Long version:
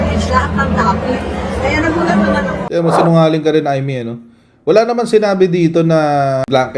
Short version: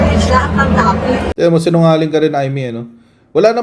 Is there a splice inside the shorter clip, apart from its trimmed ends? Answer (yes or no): yes